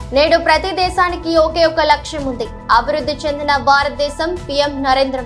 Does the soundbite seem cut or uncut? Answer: uncut